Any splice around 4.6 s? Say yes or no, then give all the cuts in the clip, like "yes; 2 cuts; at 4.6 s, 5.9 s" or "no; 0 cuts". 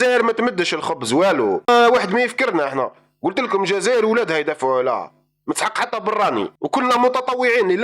no; 2 cuts; at 1.7 s, 6.5 s